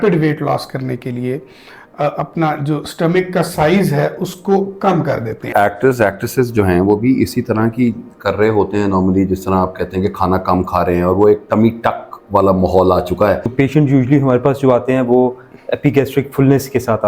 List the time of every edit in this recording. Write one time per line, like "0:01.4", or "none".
0:05.5
0:13.5